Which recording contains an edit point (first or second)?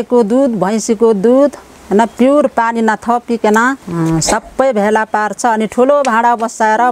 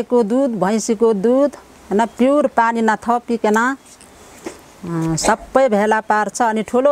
first